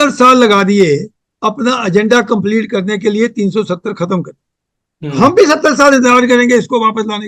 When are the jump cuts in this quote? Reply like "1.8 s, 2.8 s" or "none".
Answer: none